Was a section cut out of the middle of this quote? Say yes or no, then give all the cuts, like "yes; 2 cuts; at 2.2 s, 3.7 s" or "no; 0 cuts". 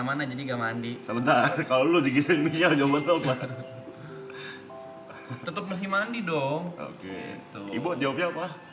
no; 0 cuts